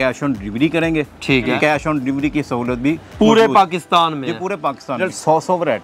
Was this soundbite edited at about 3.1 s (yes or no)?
no